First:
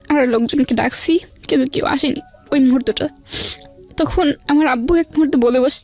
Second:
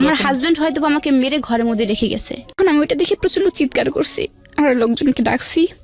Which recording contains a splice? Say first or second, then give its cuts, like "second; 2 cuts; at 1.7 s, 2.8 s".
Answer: second; 1 cut; at 2.6 s